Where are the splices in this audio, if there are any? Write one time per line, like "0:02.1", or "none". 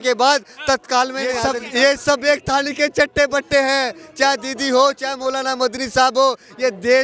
0:01.5

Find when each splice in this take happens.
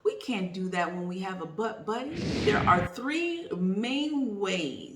0:02.3

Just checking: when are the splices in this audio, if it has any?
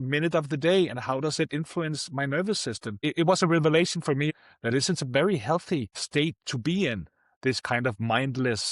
0:03.0
0:04.3
0:06.0

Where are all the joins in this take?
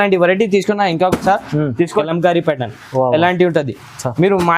0:02.1

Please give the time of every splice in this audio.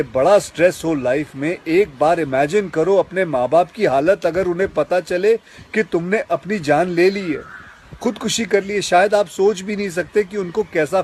none

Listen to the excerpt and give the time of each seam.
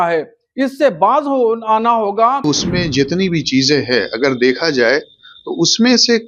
0:02.4

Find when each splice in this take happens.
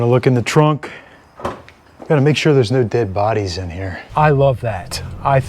0:01.7
0:04.0

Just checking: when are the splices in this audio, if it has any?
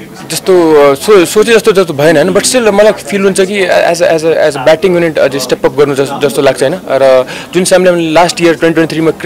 none

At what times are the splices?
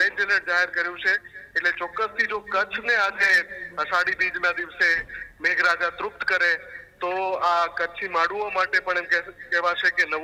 none

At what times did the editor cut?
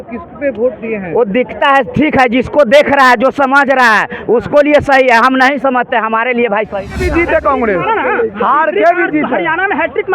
0:06.9

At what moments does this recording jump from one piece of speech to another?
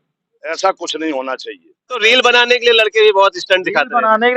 0:02.0

